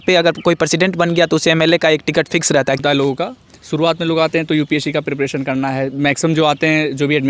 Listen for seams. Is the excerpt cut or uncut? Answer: cut